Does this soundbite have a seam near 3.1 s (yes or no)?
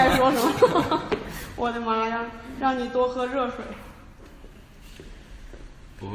no